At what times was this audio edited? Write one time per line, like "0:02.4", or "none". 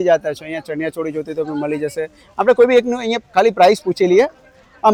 none